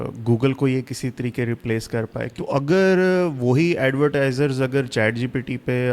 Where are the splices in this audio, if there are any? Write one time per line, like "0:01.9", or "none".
0:02.3

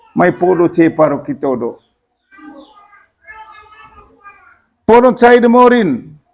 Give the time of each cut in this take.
none

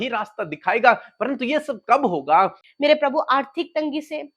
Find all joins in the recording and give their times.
0:02.6

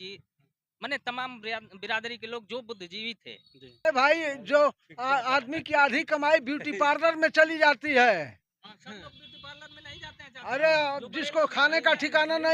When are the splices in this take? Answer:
0:03.9

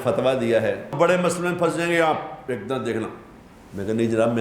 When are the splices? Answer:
0:00.9

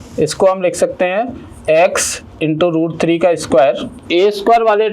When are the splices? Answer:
0:04.0

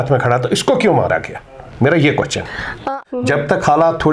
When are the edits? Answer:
0:02.8

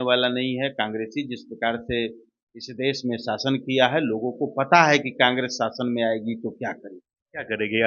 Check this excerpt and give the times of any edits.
none

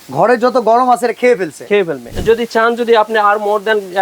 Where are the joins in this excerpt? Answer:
0:02.1

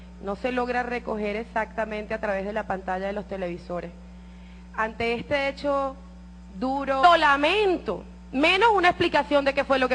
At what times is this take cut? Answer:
none

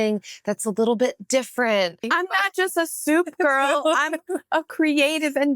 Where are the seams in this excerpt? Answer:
0:02.1

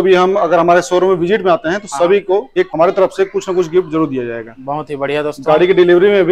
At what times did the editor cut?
0:02.6

